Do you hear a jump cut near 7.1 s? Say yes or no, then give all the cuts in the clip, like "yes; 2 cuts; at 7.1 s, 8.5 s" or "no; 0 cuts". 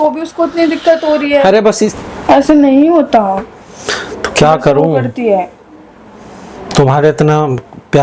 no; 1 cut; at 1.9 s